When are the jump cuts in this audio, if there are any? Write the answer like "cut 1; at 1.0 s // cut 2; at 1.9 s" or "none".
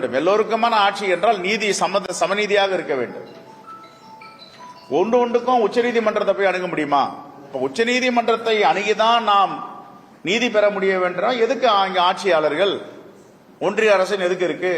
cut 1; at 13.7 s